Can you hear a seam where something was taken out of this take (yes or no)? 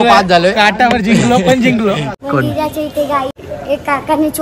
yes